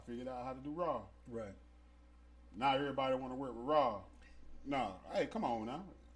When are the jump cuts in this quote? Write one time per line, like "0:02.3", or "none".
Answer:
none